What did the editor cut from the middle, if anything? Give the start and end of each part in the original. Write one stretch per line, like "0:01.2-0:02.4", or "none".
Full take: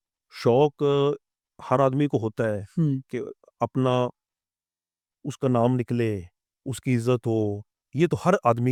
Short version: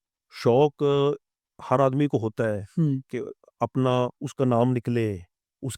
0:04.2-0:05.3

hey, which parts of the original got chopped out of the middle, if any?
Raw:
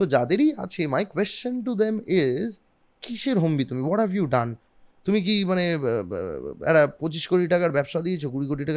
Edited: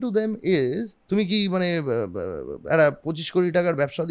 0:02.6-0:04.9

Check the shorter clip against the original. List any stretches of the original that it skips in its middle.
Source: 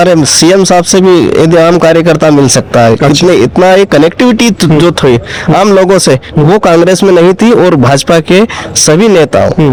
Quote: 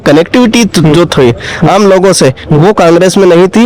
none

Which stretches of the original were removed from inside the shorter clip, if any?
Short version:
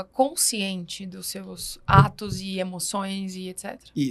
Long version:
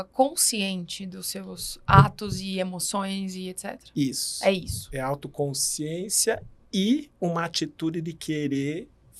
none

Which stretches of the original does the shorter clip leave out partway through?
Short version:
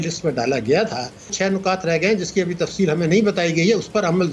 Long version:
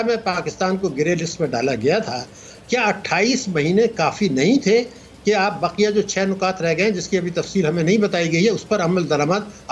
0:02.5-0:06.1

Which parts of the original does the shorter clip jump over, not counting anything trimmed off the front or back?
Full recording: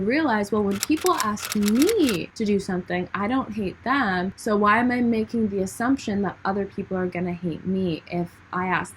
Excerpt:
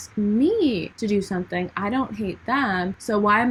none

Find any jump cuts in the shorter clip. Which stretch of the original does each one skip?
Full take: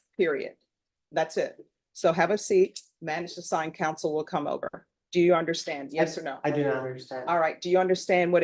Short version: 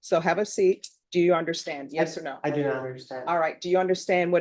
0:02.9-0:04.9

